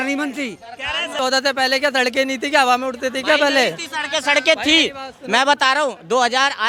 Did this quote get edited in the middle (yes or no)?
no